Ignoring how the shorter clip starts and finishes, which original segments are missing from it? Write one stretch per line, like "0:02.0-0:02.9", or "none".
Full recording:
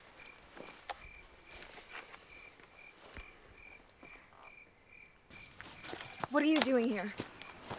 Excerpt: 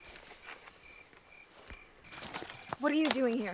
0:03.8-0:05.9